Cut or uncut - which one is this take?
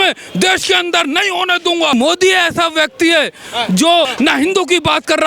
cut